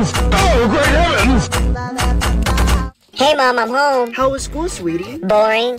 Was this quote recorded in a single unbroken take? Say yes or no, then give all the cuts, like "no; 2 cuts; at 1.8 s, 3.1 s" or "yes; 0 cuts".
no; 1 cut; at 3.0 s